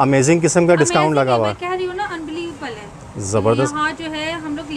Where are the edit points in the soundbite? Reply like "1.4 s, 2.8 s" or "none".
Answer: none